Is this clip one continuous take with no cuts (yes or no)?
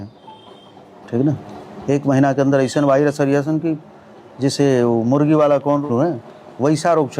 no